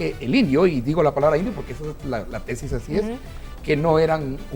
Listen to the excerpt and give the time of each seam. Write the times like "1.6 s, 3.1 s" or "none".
none